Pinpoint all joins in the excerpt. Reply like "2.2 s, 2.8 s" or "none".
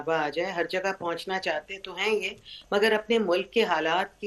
none